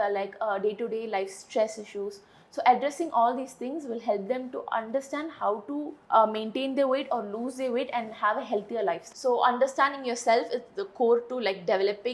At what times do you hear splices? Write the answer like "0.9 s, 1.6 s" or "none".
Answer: 9.1 s